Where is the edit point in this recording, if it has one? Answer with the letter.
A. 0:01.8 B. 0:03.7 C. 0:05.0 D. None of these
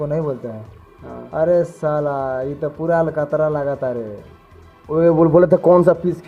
D